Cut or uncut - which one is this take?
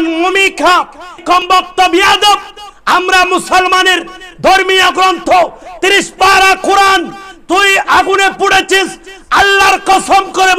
cut